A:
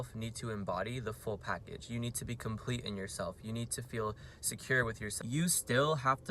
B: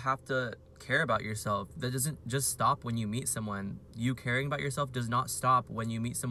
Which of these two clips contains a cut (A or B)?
A